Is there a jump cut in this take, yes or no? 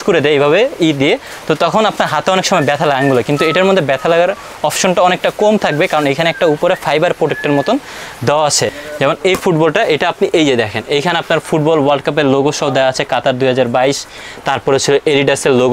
yes